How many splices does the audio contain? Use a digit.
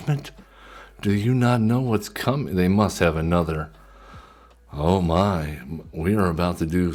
0